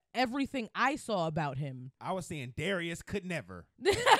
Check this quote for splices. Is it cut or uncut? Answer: uncut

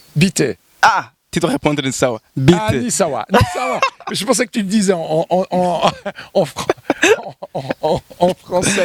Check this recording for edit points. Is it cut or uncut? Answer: uncut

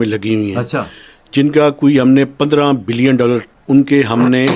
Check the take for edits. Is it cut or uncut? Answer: cut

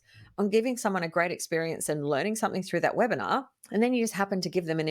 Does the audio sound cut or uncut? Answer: cut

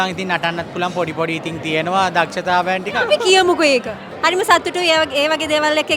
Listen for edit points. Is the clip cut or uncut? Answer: cut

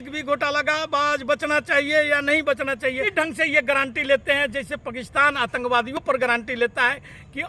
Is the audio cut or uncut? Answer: cut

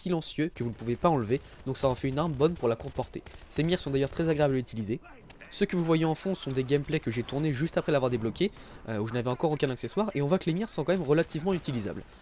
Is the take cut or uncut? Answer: cut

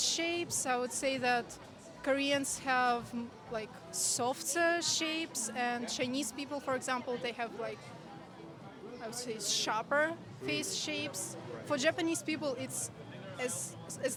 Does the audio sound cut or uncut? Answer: uncut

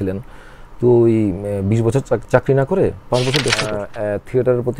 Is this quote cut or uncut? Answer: cut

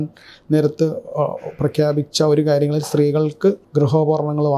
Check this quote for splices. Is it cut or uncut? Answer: cut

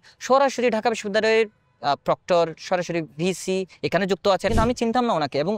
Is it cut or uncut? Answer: cut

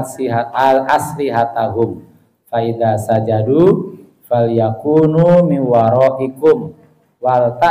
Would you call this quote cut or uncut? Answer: uncut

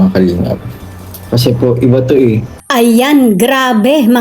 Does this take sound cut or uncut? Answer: cut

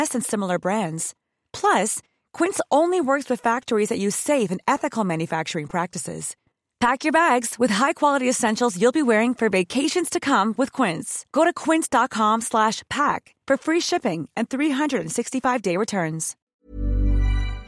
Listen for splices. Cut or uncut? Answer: cut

